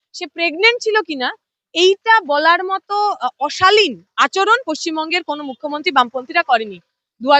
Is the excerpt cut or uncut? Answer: uncut